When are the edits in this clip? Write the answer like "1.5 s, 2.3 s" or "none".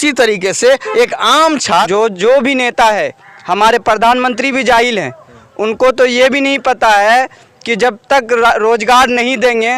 1.9 s